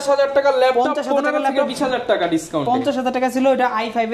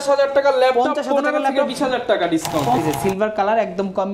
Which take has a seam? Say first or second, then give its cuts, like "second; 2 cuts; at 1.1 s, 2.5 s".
second; 1 cut; at 2.8 s